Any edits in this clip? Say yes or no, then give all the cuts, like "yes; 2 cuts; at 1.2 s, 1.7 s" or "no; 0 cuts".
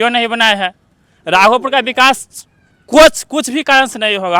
no; 0 cuts